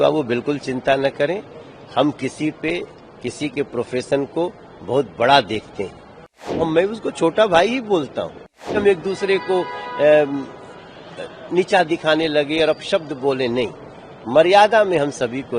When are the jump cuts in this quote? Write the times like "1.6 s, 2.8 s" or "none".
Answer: 6.7 s, 8.7 s